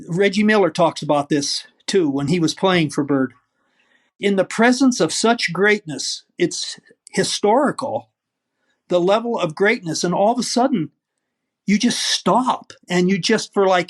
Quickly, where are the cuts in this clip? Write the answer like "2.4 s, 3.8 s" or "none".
2.3 s, 4.1 s